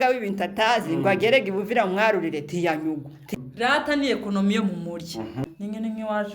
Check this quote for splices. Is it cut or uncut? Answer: cut